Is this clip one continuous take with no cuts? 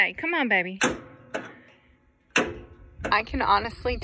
no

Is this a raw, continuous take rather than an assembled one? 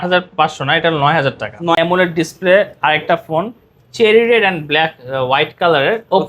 no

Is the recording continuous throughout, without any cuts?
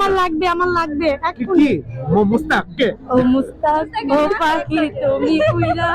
yes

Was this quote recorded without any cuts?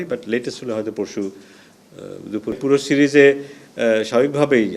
no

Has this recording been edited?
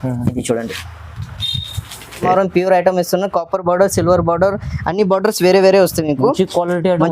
yes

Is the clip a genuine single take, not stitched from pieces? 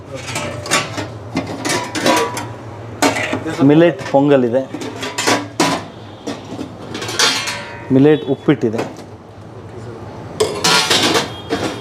yes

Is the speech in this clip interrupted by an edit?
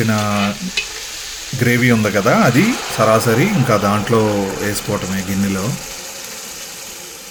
no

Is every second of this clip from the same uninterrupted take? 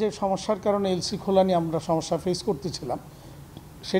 yes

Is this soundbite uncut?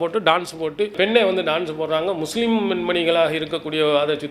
yes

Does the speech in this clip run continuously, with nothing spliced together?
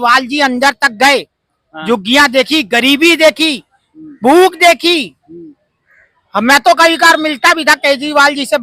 yes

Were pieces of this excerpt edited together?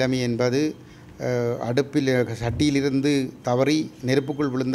no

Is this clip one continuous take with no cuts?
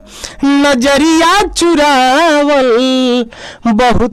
yes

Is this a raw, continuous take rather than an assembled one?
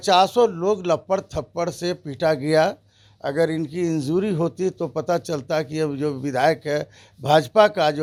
yes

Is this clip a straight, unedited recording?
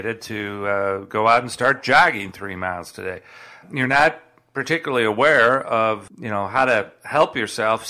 no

